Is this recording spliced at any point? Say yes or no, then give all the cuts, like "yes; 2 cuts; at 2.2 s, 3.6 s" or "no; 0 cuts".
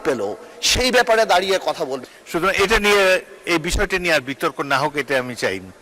yes; 1 cut; at 2.0 s